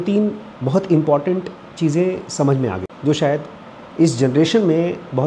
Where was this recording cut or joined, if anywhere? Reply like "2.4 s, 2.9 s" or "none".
2.9 s